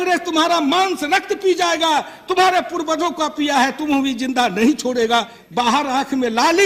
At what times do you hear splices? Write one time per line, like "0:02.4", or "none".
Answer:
0:05.4